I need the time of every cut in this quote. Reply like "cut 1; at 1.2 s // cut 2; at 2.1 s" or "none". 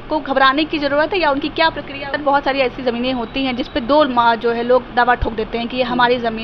cut 1; at 2.1 s